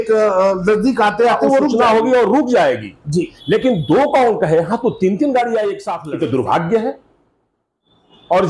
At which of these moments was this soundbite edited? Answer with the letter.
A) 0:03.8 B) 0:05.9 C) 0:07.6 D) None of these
B